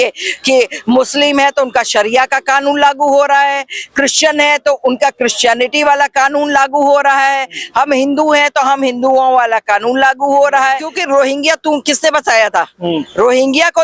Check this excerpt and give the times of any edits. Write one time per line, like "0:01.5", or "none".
0:11.0

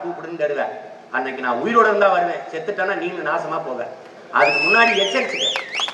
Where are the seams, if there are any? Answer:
none

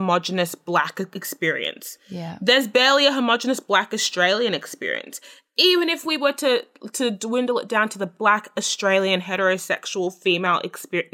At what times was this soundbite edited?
none

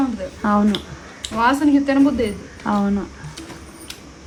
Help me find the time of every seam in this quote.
none

